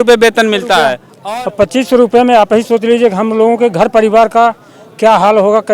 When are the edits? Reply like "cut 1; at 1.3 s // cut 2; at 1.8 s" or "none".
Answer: cut 1; at 1.1 s